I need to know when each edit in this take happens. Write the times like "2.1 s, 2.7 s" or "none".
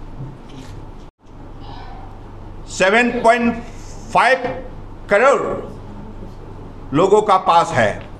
1.1 s

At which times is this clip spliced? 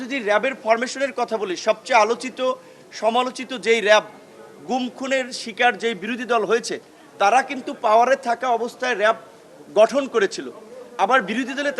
none

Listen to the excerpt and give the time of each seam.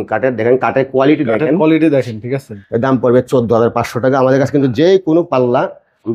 2.6 s

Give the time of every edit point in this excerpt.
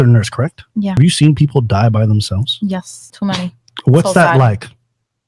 1.0 s, 3.0 s

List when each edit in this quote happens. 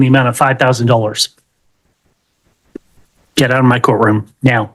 none

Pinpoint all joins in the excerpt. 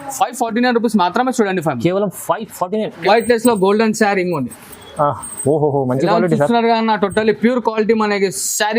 3.0 s

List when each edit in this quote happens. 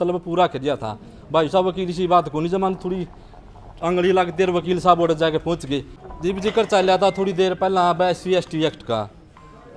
5.9 s

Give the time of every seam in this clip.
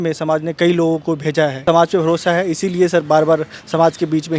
1.6 s

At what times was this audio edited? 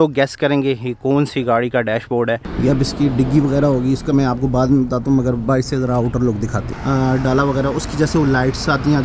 2.5 s, 6.7 s

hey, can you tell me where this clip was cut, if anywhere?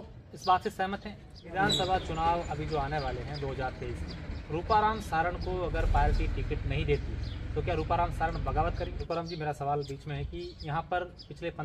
1.5 s, 9.0 s

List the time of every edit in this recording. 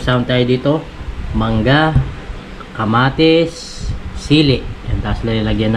none

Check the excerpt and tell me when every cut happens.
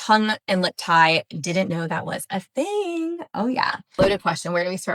4.0 s

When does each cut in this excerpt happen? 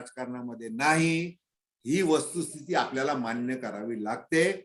none

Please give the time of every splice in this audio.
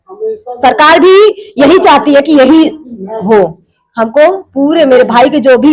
none

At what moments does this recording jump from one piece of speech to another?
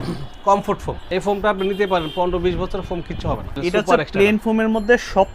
0.9 s, 3.5 s

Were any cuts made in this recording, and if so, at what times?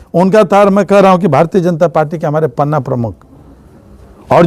none

